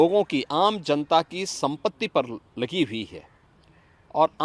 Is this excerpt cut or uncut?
uncut